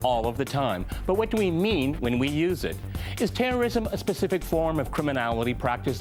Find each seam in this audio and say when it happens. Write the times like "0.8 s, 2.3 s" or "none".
none